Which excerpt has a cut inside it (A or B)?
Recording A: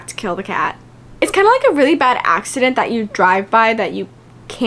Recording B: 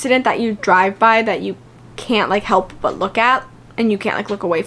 A